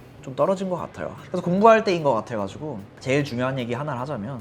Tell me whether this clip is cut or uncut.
cut